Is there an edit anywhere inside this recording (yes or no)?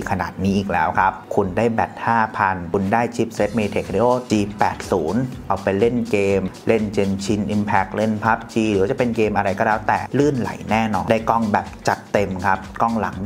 no